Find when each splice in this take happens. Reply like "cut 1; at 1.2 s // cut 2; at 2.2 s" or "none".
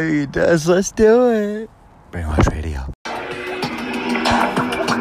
cut 1; at 2.8 s